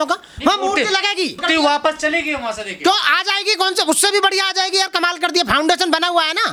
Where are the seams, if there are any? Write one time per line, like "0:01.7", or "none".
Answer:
none